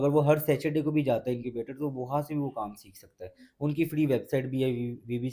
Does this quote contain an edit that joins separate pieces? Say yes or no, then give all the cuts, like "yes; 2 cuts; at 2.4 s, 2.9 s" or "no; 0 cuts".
no; 0 cuts